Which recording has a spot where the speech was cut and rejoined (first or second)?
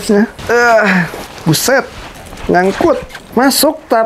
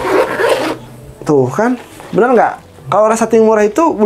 first